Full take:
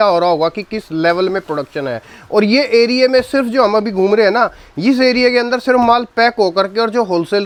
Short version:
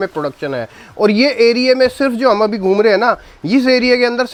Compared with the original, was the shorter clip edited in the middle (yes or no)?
no